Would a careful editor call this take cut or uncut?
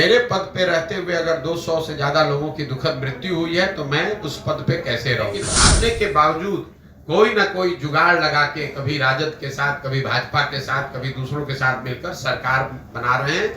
cut